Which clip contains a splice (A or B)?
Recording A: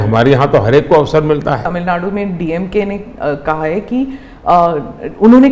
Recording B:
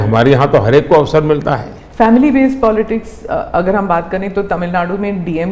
A